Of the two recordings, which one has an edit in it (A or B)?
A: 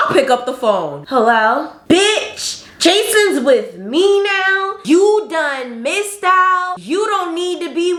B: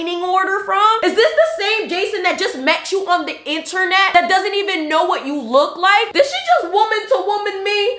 B